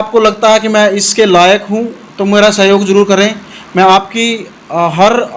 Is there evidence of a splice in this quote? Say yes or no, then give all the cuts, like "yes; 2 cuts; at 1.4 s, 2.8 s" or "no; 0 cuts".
no; 0 cuts